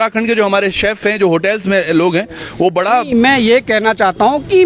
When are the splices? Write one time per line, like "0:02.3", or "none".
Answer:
none